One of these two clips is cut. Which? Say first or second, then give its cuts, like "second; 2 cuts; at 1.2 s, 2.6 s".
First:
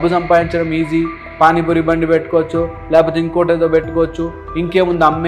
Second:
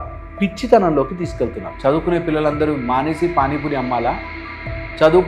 second; 1 cut; at 1.7 s